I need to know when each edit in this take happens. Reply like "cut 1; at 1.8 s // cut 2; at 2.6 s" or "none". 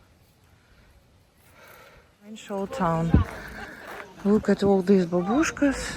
cut 1; at 2.5 s